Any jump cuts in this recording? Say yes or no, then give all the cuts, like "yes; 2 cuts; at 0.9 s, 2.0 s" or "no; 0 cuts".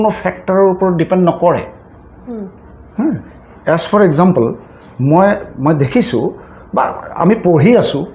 no; 0 cuts